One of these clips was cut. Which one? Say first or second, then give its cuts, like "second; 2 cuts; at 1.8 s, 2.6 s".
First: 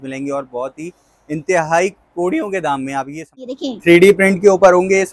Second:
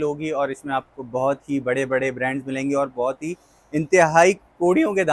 first; 1 cut; at 3.6 s